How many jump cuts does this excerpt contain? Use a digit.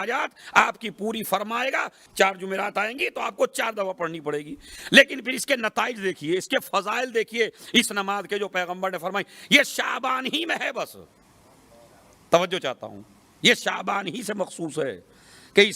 1